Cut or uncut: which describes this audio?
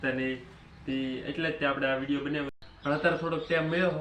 cut